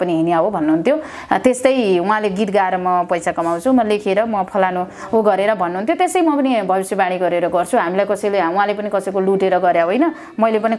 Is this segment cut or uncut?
uncut